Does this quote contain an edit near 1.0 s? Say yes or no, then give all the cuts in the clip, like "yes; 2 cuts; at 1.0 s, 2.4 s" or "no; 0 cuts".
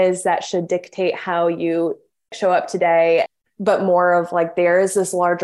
no; 2 cuts; at 2.3 s, 3.3 s